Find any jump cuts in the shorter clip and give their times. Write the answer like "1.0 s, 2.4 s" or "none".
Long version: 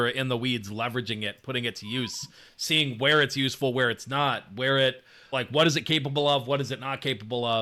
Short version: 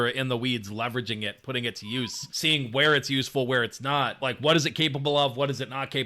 2.2 s, 4.2 s